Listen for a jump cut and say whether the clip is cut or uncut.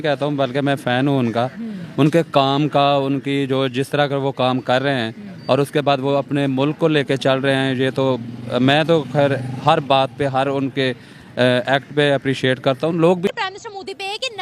cut